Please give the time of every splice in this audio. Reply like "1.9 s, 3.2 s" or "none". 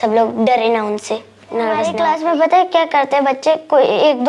1.9 s